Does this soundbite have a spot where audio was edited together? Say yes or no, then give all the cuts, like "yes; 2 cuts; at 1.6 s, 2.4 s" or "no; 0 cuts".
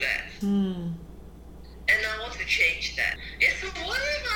yes; 1 cut; at 3.1 s